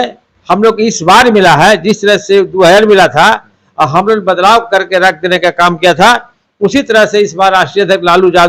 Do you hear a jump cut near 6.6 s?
no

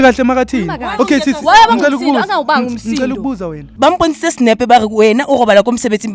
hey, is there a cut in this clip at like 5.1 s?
no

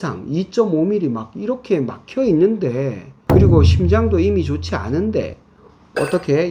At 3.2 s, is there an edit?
no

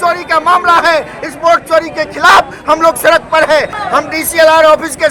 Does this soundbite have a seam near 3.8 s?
yes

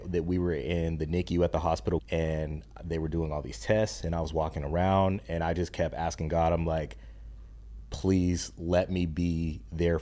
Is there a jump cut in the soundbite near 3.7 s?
no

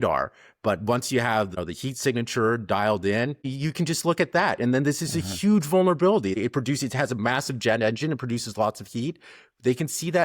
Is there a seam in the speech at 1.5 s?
yes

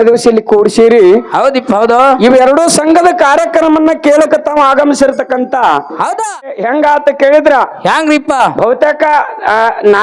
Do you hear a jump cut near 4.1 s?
no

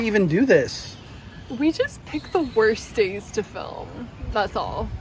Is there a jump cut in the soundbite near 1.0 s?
no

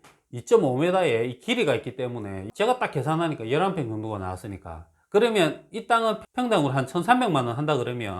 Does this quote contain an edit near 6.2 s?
yes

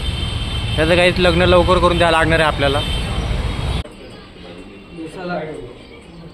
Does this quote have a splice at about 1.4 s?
no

